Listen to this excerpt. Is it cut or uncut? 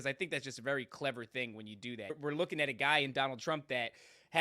cut